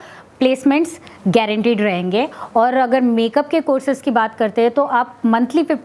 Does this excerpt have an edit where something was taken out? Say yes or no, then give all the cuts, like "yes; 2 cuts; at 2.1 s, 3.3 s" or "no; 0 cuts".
no; 0 cuts